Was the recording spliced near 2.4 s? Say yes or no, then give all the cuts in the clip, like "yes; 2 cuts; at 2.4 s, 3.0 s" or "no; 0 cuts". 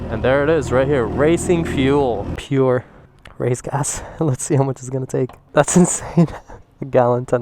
yes; 2 cuts; at 2.4 s, 5.4 s